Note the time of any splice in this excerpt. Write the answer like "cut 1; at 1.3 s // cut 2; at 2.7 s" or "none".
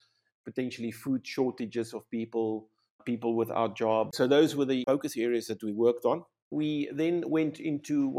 cut 1; at 3.0 s // cut 2; at 4.1 s // cut 3; at 4.8 s // cut 4; at 6.5 s